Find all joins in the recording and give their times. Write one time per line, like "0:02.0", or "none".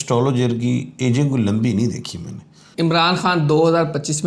0:02.6